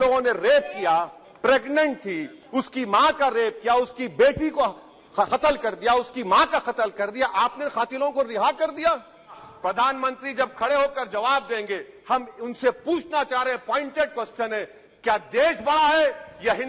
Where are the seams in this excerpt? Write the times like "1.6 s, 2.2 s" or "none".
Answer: 9.5 s